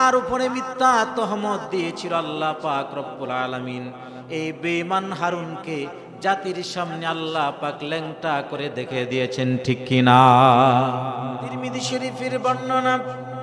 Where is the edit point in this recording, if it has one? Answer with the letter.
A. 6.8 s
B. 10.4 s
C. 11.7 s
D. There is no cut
C